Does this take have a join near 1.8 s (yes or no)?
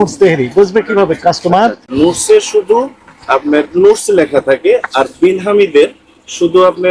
no